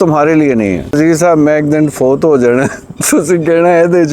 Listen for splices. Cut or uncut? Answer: cut